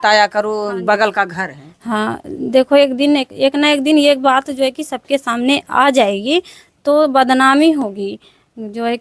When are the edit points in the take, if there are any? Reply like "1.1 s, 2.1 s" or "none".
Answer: none